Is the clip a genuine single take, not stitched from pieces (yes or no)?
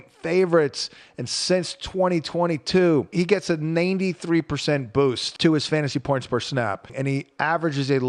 no